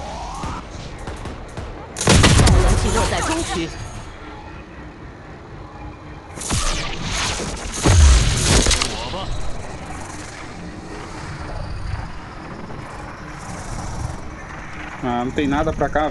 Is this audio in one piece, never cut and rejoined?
yes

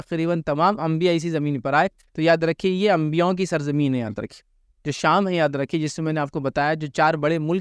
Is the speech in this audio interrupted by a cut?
no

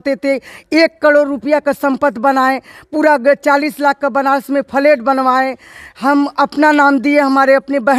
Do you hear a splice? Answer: no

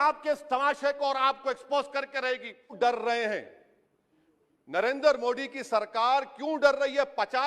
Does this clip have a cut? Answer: yes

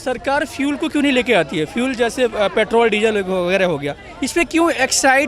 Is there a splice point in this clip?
no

